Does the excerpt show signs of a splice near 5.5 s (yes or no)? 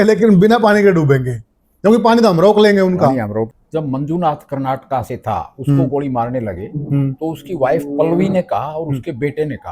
no